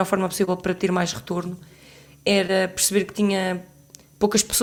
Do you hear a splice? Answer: no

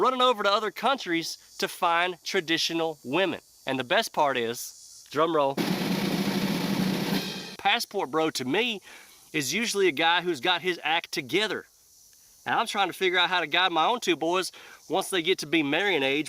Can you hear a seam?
yes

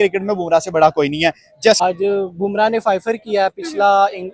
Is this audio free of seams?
no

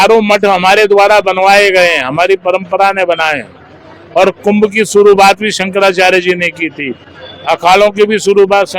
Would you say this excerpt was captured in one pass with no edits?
yes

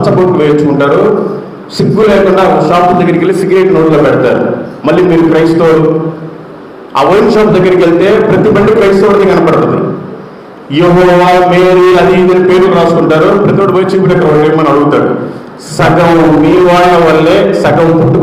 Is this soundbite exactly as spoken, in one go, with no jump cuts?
yes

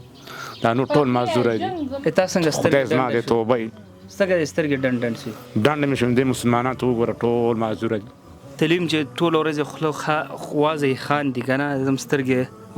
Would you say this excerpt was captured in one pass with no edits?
no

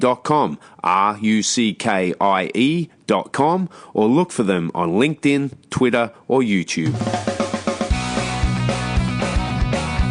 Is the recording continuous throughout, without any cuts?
no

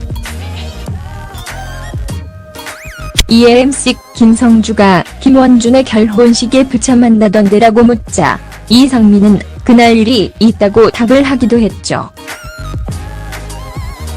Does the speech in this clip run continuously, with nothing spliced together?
no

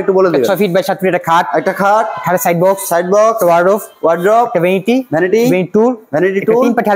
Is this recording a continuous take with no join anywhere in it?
yes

